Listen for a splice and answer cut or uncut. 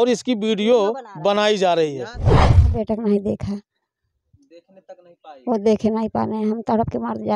cut